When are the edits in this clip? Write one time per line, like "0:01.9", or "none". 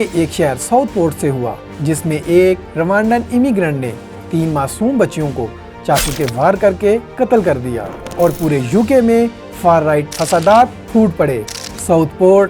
0:08.0